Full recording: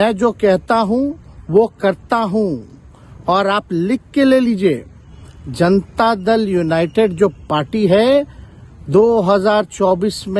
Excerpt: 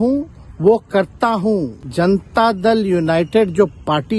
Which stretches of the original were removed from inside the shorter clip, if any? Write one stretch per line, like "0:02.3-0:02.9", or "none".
0:02.7-0:05.4